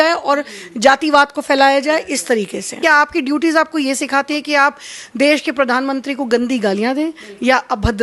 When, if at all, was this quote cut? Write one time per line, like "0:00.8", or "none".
0:02.8